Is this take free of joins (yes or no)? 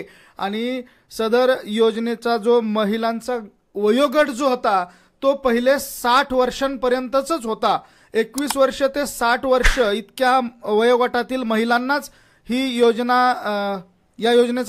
yes